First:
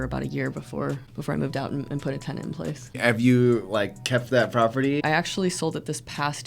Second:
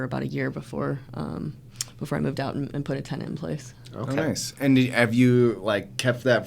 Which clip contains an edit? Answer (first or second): first